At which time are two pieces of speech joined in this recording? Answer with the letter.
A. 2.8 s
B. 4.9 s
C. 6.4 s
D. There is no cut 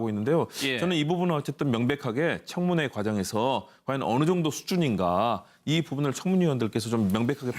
A